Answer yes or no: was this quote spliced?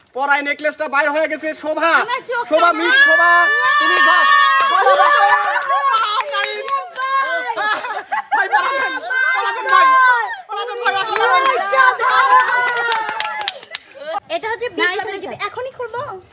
yes